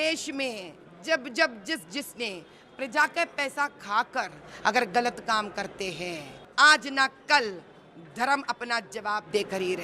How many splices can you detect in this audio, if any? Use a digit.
1